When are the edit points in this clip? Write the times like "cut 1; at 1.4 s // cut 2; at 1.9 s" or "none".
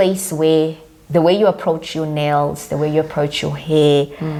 none